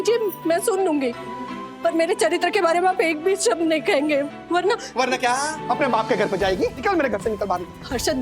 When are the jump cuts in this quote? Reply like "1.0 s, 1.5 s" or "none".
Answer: 5.6 s, 6.8 s